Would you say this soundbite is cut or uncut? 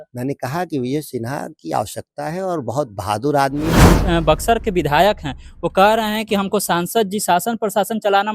cut